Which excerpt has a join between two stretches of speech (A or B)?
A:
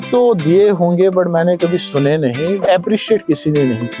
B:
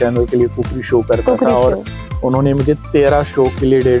A